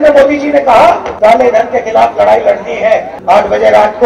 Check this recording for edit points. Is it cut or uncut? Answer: cut